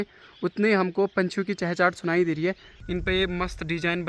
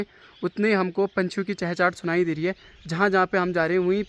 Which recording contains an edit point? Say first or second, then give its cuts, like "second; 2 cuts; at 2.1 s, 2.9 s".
first; 1 cut; at 2.7 s